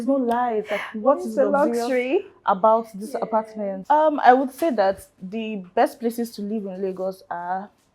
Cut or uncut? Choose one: cut